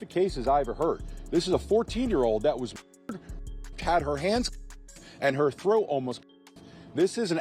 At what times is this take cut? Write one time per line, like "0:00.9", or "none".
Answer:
none